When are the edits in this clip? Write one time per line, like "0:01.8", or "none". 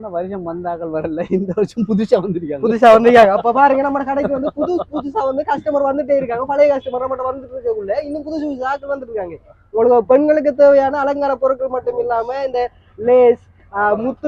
none